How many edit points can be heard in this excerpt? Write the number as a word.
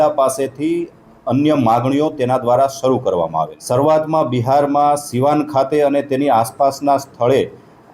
one